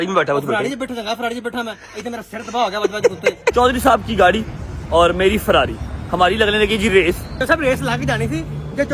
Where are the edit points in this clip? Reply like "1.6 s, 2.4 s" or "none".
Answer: 3.5 s, 7.4 s